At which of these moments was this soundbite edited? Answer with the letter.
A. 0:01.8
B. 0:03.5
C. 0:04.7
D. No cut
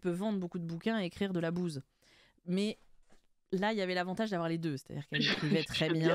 D